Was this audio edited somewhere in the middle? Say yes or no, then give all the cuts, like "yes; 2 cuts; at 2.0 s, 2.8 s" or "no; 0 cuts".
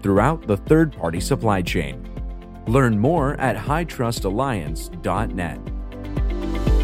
yes; 1 cut; at 5.9 s